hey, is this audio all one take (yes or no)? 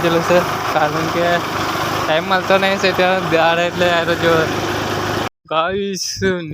no